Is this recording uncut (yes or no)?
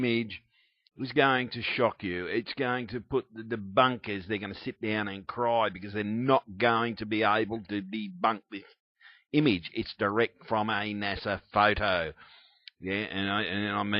no